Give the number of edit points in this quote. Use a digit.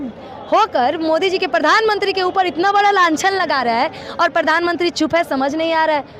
0